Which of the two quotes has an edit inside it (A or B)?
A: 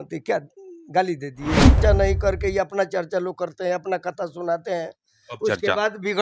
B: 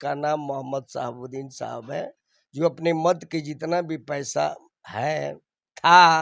A